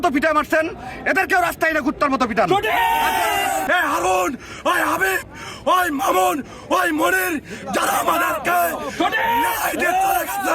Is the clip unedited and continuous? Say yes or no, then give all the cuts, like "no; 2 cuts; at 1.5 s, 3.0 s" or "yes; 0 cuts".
no; 1 cut; at 3.6 s